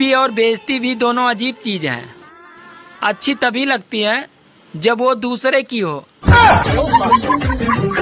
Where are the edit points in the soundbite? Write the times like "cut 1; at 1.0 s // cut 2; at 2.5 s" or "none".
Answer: none